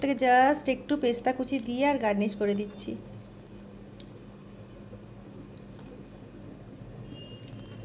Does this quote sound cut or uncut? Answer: uncut